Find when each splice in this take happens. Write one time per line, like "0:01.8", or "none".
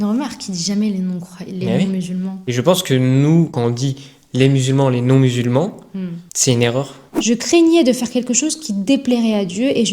0:02.4
0:03.6
0:07.1

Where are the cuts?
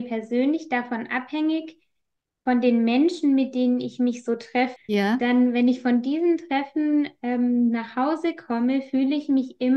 0:04.8

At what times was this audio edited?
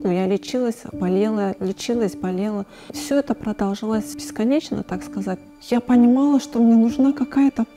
0:04.2
0:05.5

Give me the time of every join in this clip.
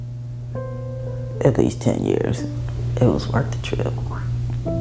0:01.0
0:02.5

